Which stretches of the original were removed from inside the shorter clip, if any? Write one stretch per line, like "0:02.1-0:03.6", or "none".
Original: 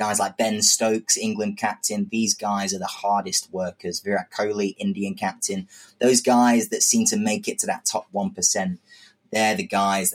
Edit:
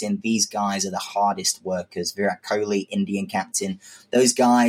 none